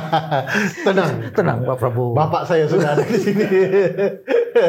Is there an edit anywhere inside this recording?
no; 0 cuts

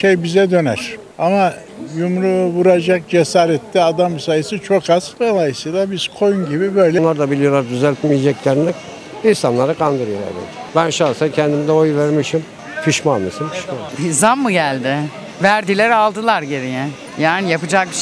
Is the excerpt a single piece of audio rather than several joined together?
no; 2 cuts; at 7.0 s, 13.8 s

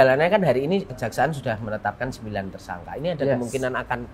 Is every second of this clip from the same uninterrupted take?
no; 1 cut; at 1.0 s

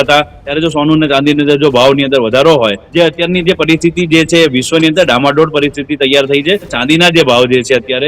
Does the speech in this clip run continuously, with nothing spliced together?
no; 2 cuts; at 2.8 s, 6.8 s

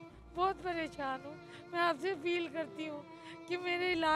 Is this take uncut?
yes; 0 cuts

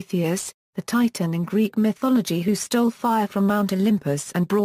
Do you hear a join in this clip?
no; 0 cuts

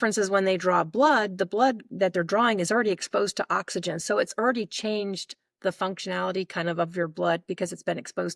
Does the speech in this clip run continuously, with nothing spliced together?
yes; 0 cuts

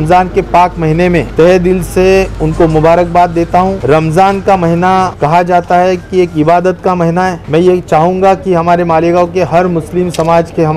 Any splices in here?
yes; 4 cuts; at 1.3 s, 3.8 s, 5.1 s, 7.4 s

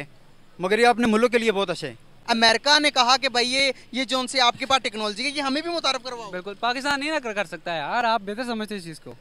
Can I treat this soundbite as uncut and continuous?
no; 1 cut; at 2.1 s

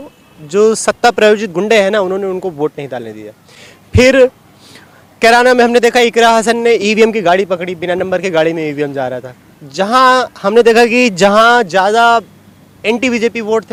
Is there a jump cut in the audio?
no; 0 cuts

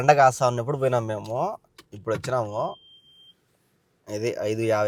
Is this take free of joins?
yes; 0 cuts

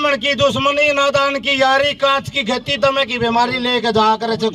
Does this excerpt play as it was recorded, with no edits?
yes; 0 cuts

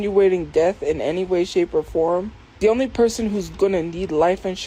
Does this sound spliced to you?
no; 0 cuts

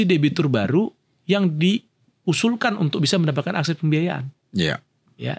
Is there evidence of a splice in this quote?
no; 0 cuts

